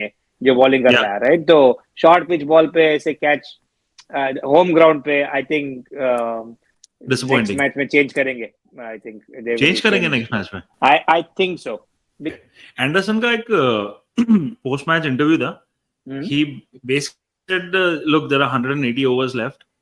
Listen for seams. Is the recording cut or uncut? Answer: cut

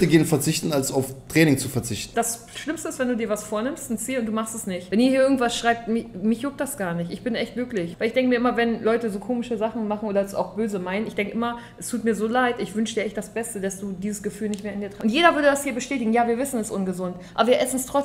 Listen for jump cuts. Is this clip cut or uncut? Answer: cut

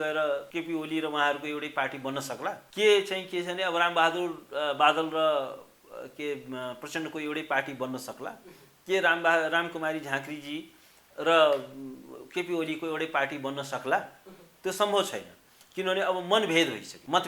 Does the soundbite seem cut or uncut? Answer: uncut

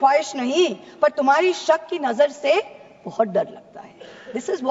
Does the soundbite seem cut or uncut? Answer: uncut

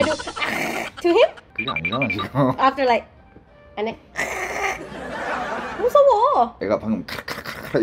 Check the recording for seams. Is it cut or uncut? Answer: cut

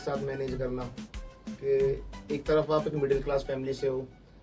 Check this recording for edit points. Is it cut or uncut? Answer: uncut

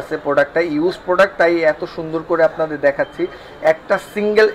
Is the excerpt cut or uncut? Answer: uncut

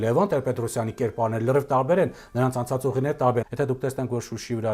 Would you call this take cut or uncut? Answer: cut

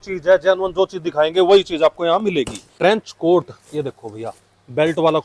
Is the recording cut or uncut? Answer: cut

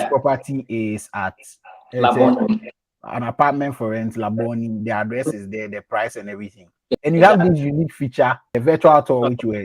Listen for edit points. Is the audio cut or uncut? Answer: cut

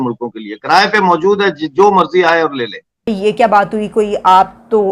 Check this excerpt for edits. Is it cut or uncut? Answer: cut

